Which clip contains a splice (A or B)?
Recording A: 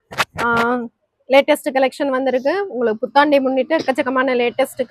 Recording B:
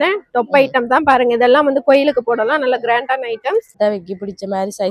B